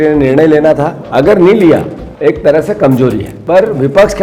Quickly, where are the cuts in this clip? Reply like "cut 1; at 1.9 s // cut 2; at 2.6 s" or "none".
cut 1; at 1.0 s // cut 2; at 2.0 s // cut 3; at 3.3 s